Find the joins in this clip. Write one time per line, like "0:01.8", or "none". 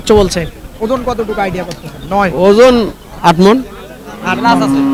none

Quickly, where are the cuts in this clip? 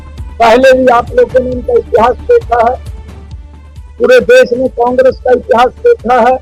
none

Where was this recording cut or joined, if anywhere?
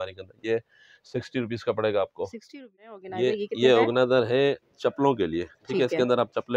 0:02.9

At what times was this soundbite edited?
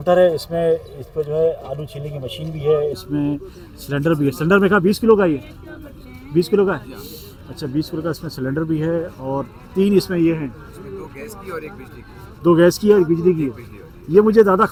none

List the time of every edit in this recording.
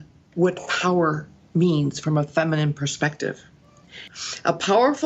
0:03.6

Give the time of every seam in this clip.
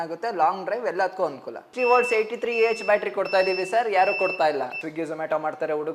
0:01.7
0:04.8

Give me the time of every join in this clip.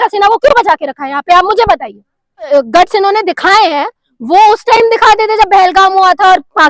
0:02.5

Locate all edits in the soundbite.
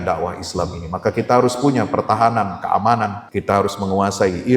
0:03.3

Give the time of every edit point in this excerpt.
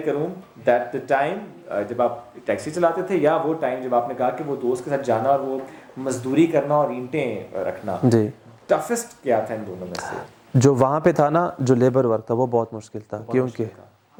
none

